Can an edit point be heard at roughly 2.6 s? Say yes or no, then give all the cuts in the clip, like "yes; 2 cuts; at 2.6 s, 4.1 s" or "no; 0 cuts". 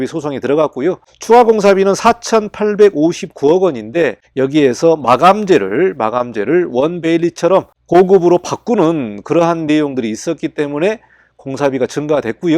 no; 0 cuts